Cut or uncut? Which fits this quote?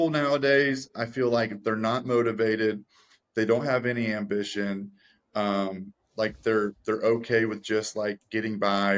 uncut